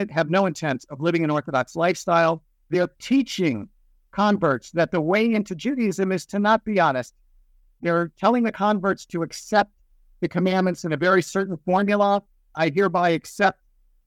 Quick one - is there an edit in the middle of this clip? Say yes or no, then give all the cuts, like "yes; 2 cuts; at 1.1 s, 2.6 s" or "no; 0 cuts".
yes; 2 cuts; at 2.7 s, 12.5 s